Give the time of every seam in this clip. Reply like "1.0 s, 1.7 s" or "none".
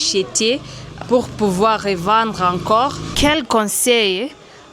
1.0 s, 3.0 s